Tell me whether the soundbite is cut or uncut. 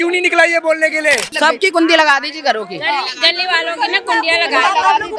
cut